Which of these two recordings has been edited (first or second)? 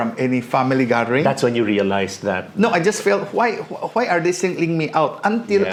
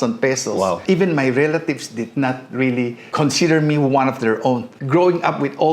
second